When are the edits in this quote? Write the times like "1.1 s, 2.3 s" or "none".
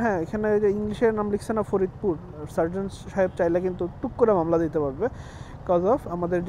none